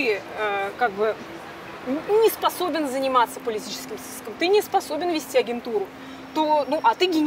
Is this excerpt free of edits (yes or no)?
yes